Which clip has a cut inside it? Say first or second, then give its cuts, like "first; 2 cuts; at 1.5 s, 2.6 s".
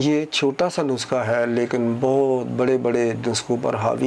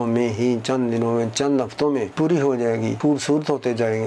second; 2 cuts; at 2.1 s, 3.0 s